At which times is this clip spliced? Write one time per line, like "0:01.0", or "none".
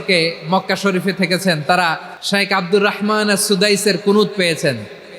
0:02.1